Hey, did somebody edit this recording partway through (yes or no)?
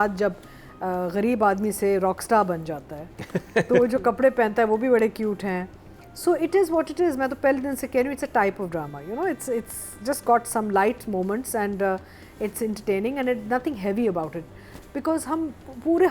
no